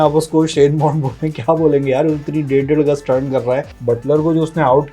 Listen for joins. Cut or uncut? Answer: cut